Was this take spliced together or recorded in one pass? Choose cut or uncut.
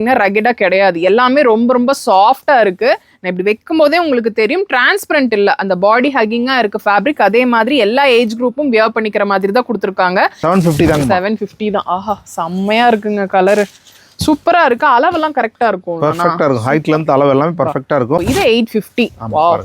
cut